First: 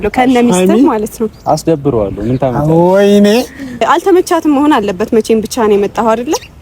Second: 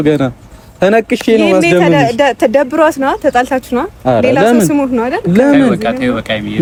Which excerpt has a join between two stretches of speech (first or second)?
first